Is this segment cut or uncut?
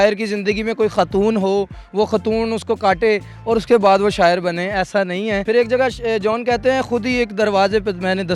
cut